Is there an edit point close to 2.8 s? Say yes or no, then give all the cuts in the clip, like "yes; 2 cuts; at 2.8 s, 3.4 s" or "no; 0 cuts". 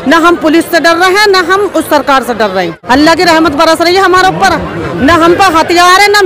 yes; 1 cut; at 2.8 s